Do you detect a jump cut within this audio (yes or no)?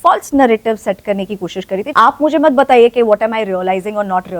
yes